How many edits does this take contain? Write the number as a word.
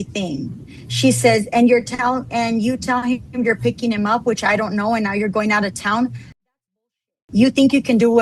zero